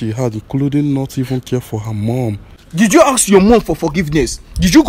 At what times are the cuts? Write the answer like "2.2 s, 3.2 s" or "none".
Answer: 2.5 s